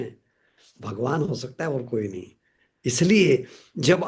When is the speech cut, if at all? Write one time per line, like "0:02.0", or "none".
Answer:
none